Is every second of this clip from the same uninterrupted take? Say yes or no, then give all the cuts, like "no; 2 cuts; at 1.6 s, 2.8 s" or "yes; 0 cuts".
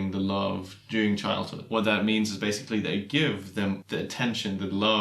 no; 2 cuts; at 1.6 s, 3.8 s